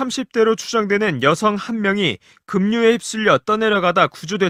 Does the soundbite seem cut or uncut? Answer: uncut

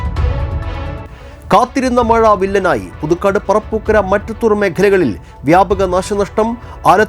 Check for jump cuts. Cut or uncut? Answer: cut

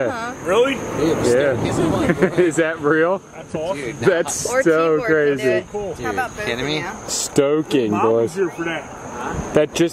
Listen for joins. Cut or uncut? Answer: uncut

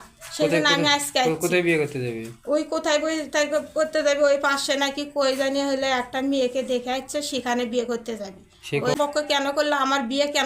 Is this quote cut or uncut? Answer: cut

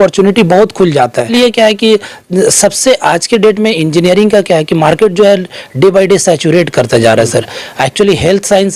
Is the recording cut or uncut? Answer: cut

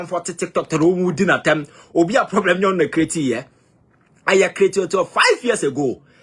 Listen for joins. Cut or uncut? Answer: uncut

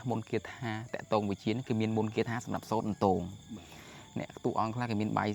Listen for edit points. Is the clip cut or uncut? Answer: uncut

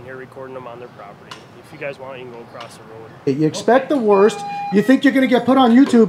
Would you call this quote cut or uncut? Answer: cut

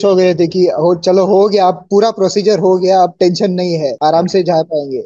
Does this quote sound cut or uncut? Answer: cut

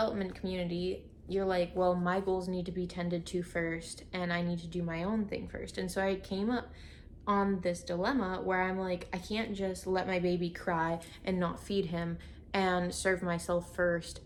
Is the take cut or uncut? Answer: uncut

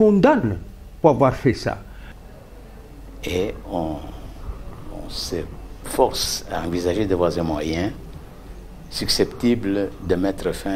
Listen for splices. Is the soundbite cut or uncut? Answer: cut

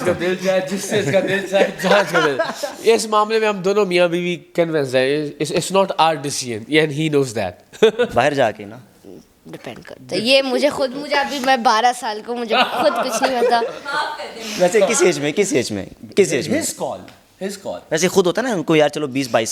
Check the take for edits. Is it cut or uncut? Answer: uncut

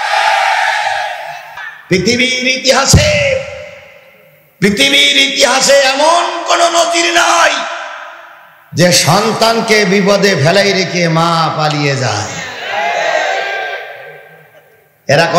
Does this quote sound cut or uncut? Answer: cut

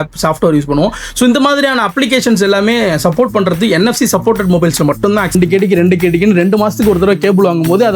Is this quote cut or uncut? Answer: cut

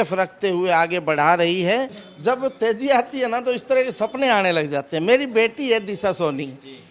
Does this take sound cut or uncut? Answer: cut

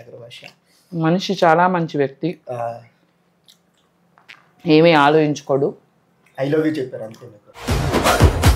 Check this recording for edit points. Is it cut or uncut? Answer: uncut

